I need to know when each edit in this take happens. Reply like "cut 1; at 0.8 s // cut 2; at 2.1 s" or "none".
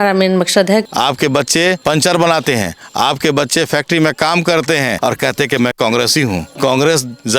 cut 1; at 0.8 s // cut 2; at 1.8 s // cut 3; at 5.0 s // cut 4; at 6.5 s